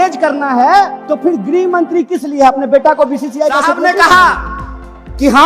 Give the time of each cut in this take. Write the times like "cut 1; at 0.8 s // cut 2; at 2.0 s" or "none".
cut 1; at 1.0 s // cut 2; at 3.8 s